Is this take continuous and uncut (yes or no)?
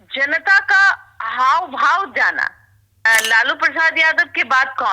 no